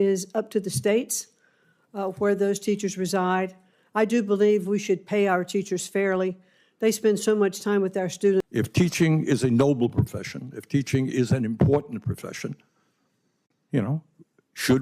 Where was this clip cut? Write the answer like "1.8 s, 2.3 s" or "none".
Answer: 8.4 s

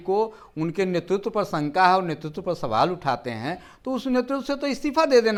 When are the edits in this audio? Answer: none

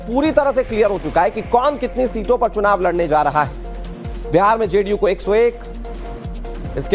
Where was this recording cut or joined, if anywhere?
1.3 s

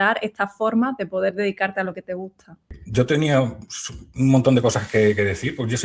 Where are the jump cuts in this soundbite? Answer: 2.8 s

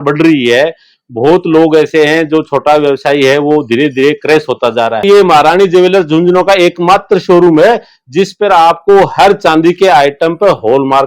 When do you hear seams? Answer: 5.0 s

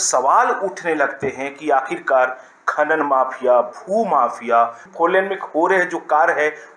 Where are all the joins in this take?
4.8 s

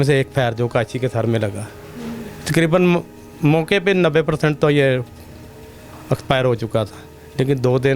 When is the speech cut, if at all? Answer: none

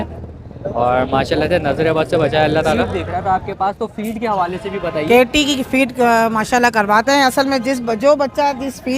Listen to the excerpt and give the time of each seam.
2.8 s

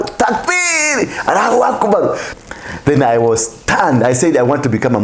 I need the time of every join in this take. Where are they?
2.2 s

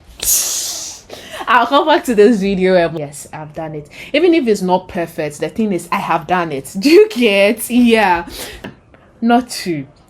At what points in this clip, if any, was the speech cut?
2.9 s, 8.7 s

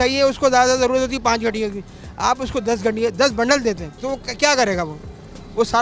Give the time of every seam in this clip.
3.9 s

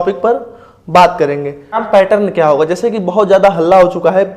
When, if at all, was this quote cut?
1.8 s

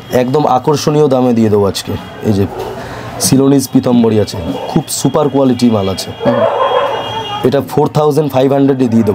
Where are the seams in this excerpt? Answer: none

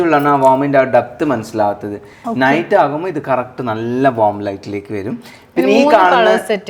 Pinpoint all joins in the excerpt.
none

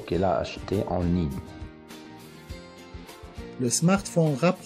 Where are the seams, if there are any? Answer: 1.7 s, 3.6 s

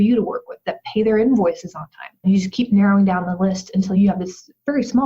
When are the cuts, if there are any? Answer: 2.2 s, 4.0 s

